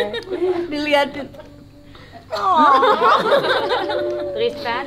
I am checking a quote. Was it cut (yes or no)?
no